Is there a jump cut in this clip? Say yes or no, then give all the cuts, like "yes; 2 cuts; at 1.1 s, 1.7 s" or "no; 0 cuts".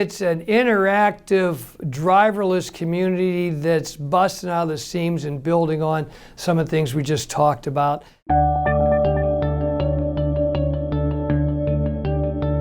yes; 1 cut; at 8.1 s